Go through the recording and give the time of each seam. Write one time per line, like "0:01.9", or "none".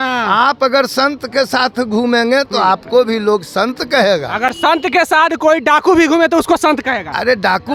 none